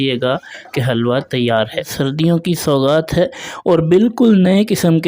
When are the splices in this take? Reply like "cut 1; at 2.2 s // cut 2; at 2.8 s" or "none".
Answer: cut 1; at 1.9 s